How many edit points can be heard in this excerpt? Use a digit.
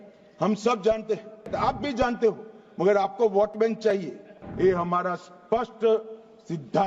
2